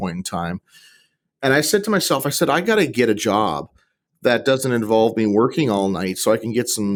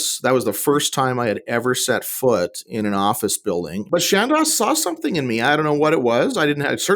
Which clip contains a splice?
second; 1 cut; at 3.8 s

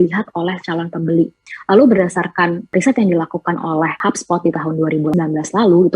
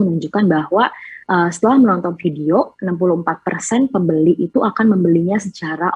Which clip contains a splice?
first; 4 cuts; at 1.4 s, 2.7 s, 4.0 s, 5.1 s

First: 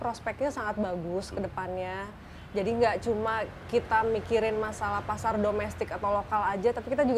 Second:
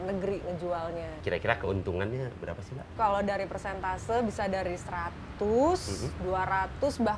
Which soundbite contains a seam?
second; 2 cuts; at 1.1 s, 2.9 s

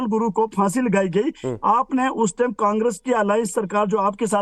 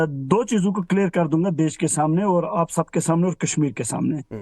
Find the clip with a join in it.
first; 1 cut; at 1.8 s

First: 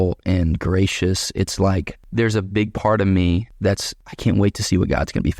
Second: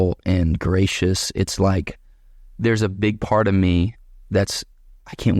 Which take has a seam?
first; 2 cuts; at 2.0 s, 3.6 s

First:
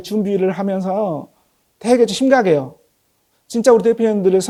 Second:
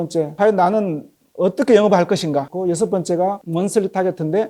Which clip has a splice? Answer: second; 2 cuts; at 2.5 s, 3.4 s

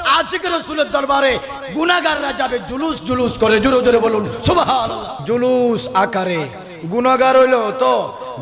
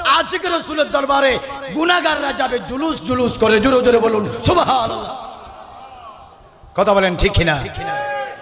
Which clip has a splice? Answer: first; 1 cut; at 5.1 s

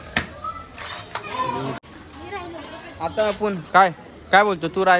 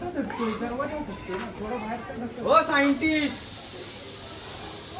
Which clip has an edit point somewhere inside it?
first; 1 cut; at 1.9 s

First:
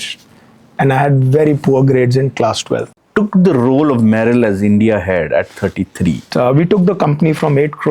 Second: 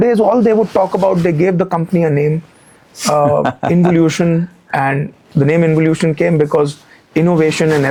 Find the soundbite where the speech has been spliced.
first; 2 cuts; at 3.0 s, 6.3 s

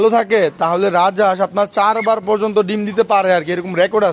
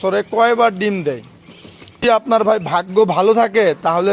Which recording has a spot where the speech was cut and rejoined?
second; 1 cut; at 2.1 s

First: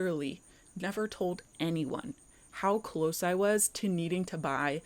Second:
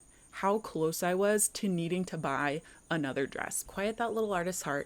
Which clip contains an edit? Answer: second; 1 cut; at 3.7 s

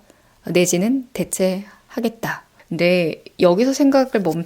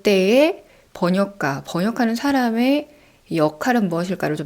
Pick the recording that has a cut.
first; 1 cut; at 2.5 s

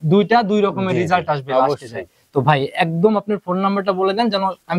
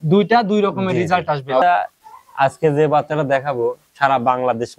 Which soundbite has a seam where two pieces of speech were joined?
second; 1 cut; at 1.6 s

